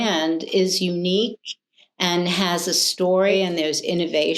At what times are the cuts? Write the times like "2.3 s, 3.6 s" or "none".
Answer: 3.3 s